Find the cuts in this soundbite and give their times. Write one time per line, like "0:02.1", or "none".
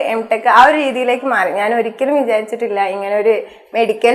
none